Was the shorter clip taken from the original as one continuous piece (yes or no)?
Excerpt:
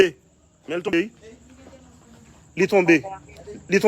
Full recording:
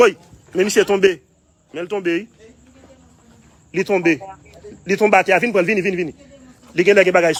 no